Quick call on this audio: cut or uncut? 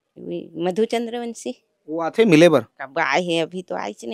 uncut